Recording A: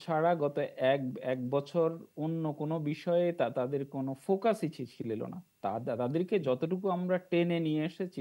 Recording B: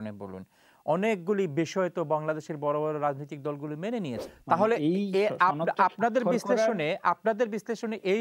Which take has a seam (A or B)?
B